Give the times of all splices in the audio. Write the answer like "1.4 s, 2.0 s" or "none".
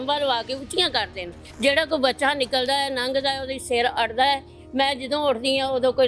none